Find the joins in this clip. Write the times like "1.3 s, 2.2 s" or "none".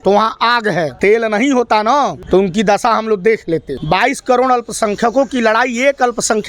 3.7 s